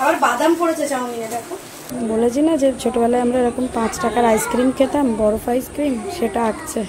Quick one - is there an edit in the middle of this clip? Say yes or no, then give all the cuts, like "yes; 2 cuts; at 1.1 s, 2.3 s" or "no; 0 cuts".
yes; 1 cut; at 1.8 s